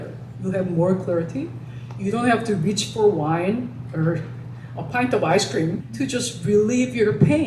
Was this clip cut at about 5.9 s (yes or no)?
yes